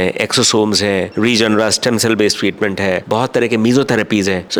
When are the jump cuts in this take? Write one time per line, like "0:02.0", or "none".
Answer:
none